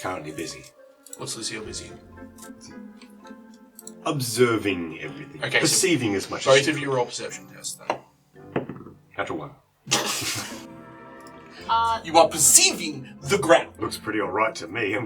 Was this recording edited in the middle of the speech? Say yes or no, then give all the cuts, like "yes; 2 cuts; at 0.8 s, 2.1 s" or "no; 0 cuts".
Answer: yes; 1 cut; at 13.8 s